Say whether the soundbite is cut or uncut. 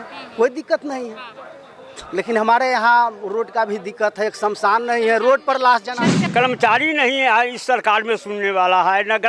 cut